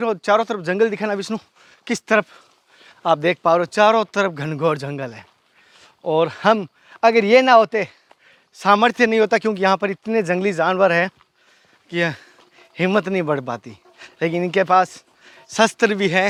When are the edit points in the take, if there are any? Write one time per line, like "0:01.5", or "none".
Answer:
none